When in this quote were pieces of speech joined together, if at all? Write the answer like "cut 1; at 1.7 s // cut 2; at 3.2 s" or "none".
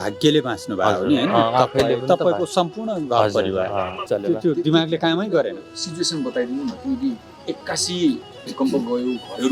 cut 1; at 4.1 s